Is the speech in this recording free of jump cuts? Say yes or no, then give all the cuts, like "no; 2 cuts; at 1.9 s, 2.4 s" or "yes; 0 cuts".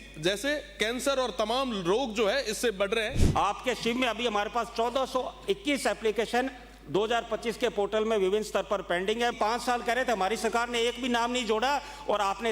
no; 2 cuts; at 3.2 s, 9.3 s